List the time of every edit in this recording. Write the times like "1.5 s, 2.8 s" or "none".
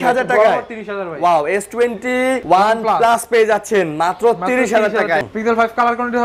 2.4 s, 5.2 s